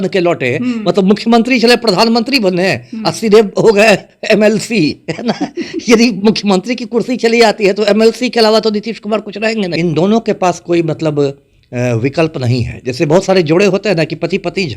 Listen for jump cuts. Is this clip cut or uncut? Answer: cut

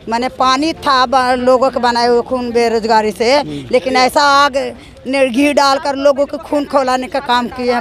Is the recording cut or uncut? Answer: uncut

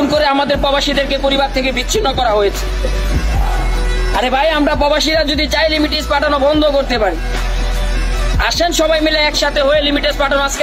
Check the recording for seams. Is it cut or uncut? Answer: uncut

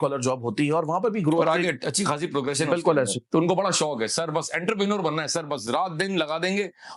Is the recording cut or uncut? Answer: cut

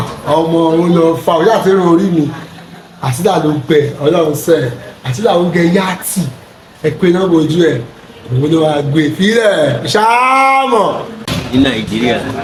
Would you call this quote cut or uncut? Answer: uncut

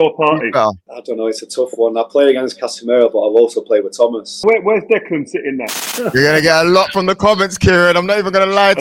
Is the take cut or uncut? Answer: cut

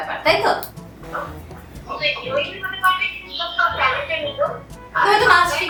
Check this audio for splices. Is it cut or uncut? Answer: uncut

